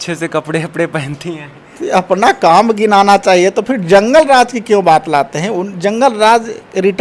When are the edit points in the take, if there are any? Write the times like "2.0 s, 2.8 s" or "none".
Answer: none